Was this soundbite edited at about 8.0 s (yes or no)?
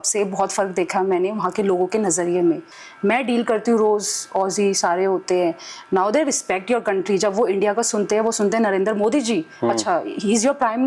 no